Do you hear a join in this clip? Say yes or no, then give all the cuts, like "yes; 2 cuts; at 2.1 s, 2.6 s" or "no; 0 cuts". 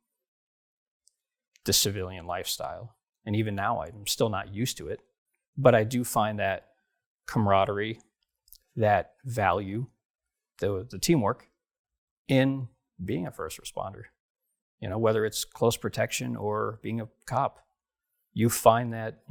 no; 0 cuts